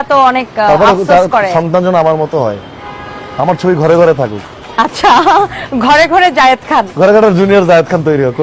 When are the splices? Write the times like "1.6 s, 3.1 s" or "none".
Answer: none